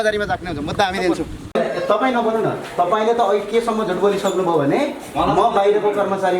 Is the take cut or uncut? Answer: cut